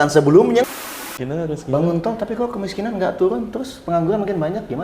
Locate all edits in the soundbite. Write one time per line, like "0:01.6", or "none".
0:00.9